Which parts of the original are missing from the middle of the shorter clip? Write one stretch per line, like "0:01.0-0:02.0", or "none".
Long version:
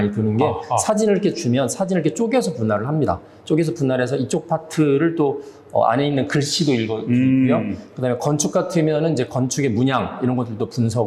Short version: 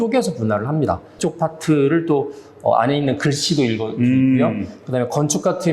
0:03.4-0:04.3